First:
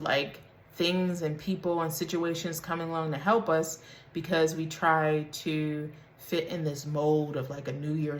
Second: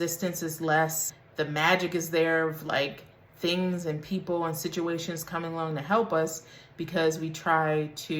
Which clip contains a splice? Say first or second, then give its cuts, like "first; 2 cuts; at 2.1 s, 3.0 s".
second; 1 cut; at 1.1 s